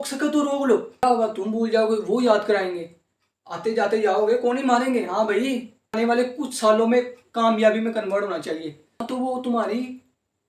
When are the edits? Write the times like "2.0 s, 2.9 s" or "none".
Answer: 1.0 s, 6.0 s, 9.1 s